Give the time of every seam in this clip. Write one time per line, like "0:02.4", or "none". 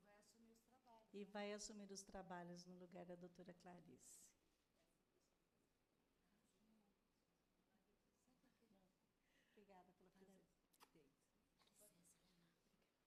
none